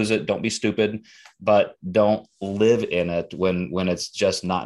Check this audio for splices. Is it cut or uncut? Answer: uncut